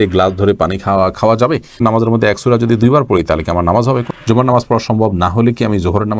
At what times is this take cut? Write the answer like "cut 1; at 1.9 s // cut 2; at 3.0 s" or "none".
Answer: cut 1; at 1.8 s // cut 2; at 4.1 s